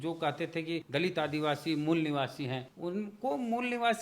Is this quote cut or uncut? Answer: cut